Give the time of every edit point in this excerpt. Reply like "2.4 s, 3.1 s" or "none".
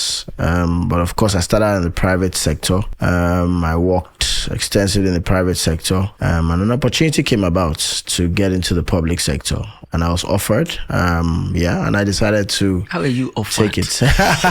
2.9 s, 6.1 s